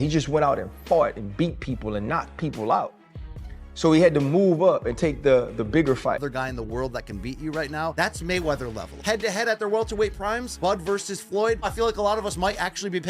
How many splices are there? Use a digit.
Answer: 1